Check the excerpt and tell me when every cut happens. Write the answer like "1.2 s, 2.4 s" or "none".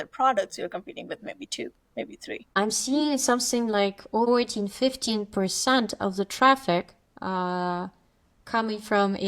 2.5 s, 4.3 s